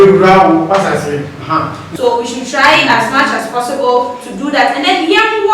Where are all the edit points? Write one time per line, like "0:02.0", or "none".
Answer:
0:01.8

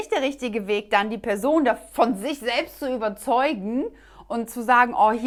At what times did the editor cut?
none

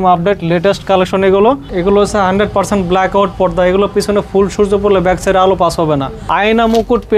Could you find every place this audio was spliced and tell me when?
0:01.7
0:06.1

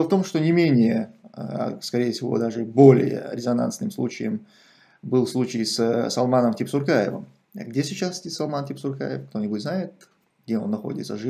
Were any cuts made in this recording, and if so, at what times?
none

